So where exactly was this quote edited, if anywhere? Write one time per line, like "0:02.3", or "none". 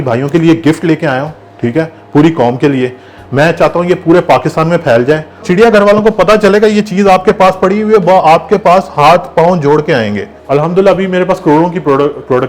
0:05.5
0:10.4